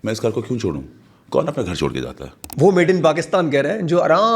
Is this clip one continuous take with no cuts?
no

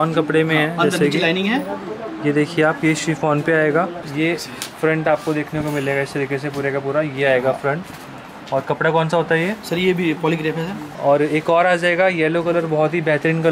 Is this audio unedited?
no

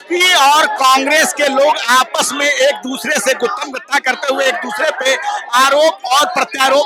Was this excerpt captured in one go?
yes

